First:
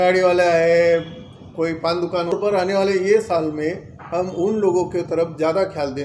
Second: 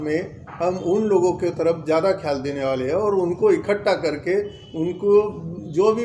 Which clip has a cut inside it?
first; 1 cut; at 2.3 s

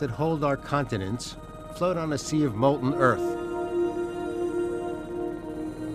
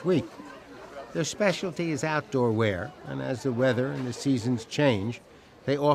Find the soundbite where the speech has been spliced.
second; 1 cut; at 5.0 s

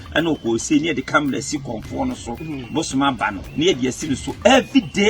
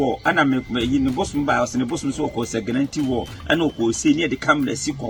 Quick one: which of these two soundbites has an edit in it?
first; 1 cut; at 3.4 s

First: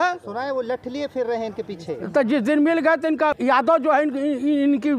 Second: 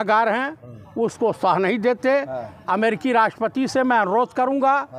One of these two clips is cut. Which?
first; 1 cut; at 3.4 s

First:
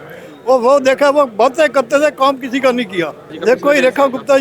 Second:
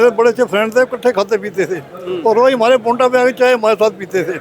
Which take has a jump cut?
first; 1 cut; at 3.3 s

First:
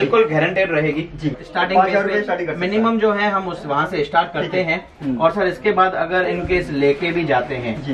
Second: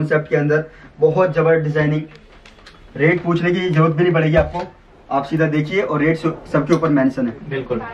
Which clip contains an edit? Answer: first; 1 cut; at 1.4 s

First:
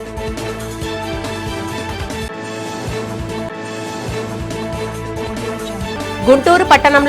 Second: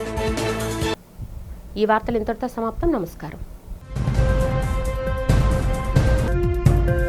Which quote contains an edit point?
first; 1 cut; at 0.9 s

